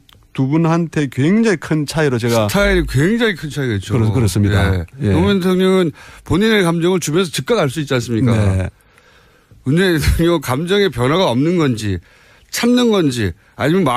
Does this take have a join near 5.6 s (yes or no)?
no